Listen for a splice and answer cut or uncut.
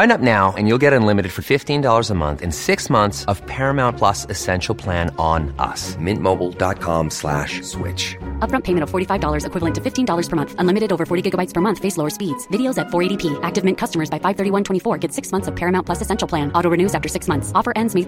uncut